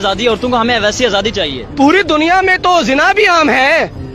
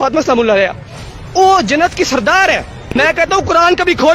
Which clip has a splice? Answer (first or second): second